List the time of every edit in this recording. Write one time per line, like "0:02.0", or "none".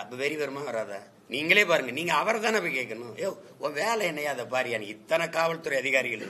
0:01.1